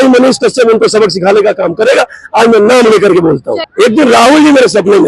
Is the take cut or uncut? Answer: uncut